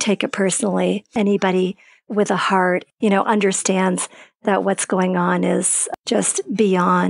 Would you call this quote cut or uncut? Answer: cut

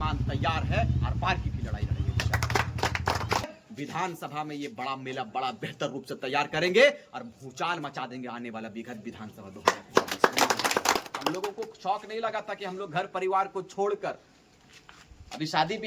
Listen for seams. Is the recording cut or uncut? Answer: cut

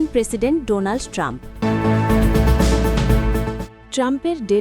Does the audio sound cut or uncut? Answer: cut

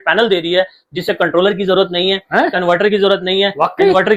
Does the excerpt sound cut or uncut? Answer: uncut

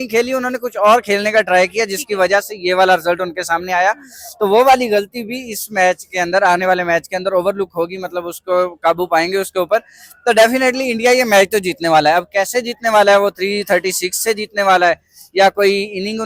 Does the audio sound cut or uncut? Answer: uncut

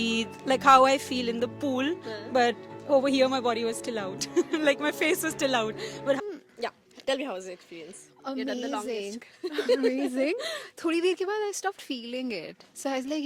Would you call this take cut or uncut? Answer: cut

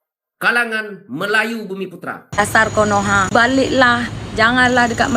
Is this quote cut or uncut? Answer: cut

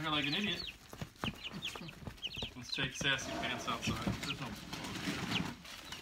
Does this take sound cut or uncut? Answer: cut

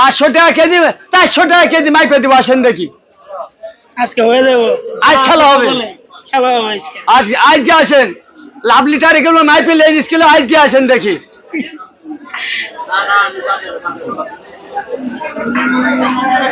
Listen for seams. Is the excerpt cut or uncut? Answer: uncut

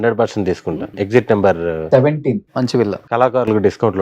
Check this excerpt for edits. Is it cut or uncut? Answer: cut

